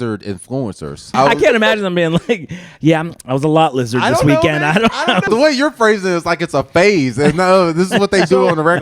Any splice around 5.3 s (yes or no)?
yes